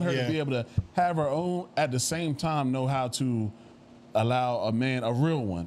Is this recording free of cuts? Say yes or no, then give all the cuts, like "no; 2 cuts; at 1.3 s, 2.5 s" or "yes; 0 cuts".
yes; 0 cuts